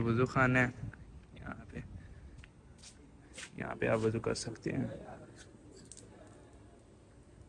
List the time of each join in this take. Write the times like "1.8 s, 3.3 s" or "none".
none